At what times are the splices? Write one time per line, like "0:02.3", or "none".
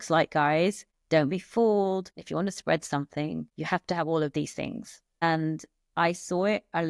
0:00.9
0:02.2
0:03.5
0:05.2